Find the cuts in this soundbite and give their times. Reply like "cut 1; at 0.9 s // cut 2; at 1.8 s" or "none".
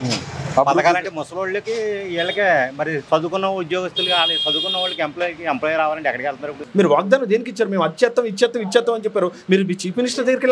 cut 1; at 6.6 s